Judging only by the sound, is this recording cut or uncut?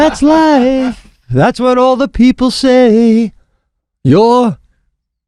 uncut